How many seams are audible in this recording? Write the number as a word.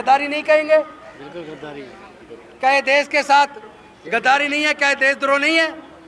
zero